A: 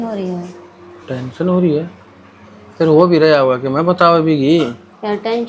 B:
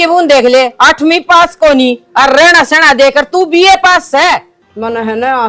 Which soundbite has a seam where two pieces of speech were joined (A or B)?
B